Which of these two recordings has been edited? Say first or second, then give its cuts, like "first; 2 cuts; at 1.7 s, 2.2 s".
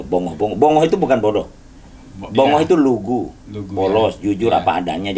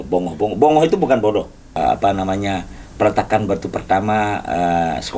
second; 1 cut; at 1.6 s